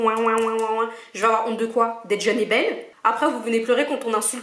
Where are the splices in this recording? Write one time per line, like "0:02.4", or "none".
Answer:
0:02.9